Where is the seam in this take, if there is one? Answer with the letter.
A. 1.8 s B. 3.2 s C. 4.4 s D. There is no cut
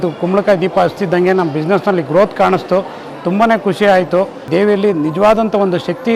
C